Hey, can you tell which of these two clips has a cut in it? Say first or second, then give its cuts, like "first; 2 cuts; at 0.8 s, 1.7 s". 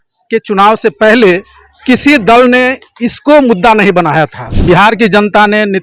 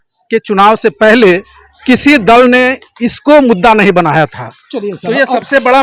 first; 1 cut; at 4.5 s